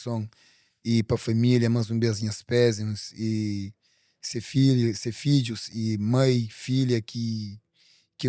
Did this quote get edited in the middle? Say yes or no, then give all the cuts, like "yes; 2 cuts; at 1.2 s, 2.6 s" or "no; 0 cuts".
no; 0 cuts